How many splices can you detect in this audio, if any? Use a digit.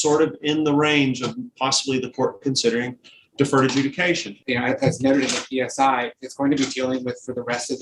1